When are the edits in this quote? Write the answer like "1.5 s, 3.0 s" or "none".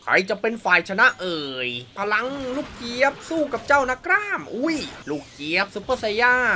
1.9 s, 4.9 s

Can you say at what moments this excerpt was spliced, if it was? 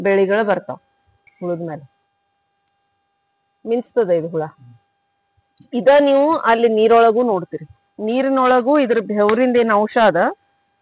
1.2 s

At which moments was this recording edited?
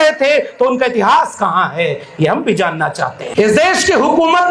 3.2 s

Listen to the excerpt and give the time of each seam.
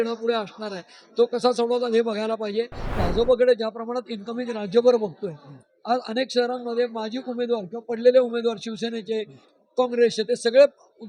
2.9 s

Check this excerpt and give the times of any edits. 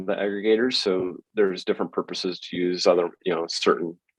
none

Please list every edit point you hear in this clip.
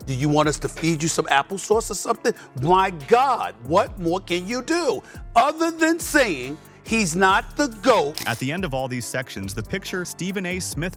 none

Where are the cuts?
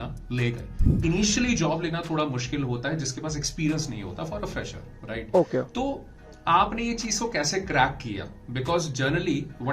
0.9 s

